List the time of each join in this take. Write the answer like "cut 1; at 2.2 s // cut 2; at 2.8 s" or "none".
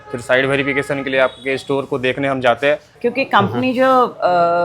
cut 1; at 2.9 s